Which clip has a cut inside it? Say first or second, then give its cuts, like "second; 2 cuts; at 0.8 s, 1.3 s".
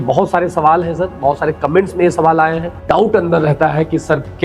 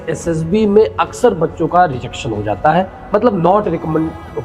first; 1 cut; at 2.7 s